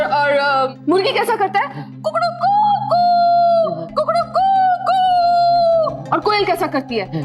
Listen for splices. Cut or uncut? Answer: cut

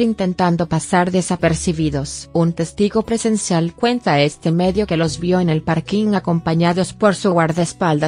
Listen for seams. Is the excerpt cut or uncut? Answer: uncut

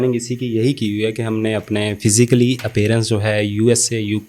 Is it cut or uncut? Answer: uncut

